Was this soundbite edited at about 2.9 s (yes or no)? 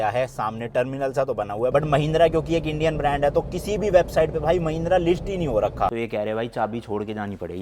no